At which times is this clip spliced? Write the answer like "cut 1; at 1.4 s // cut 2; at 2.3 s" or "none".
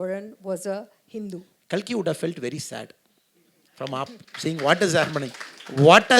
cut 1; at 1.5 s